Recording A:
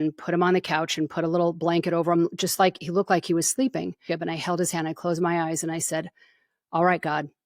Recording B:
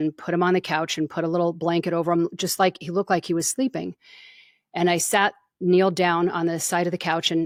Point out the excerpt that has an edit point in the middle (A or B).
A